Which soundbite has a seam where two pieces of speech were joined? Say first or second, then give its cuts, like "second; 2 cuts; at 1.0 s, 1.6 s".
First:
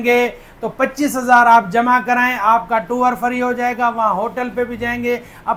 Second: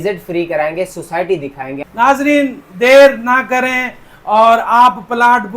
second; 1 cut; at 1.7 s